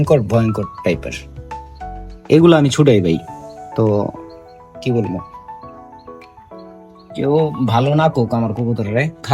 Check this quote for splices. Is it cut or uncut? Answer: uncut